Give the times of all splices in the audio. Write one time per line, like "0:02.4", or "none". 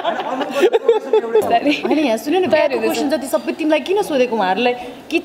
0:01.5